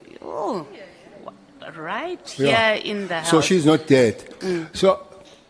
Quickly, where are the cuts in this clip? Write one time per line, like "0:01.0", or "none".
none